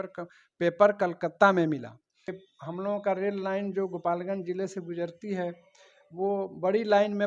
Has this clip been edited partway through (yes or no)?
yes